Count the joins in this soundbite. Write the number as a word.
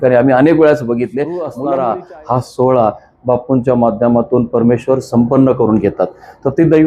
one